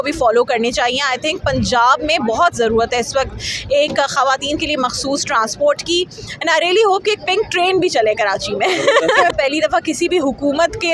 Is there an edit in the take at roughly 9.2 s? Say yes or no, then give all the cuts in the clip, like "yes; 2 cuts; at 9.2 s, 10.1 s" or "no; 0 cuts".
yes; 1 cut; at 9.2 s